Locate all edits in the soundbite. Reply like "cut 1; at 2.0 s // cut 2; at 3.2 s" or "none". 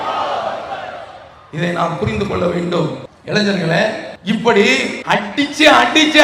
cut 1; at 3.1 s // cut 2; at 4.1 s // cut 3; at 5.0 s